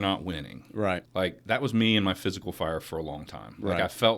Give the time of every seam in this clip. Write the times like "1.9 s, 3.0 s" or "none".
1.1 s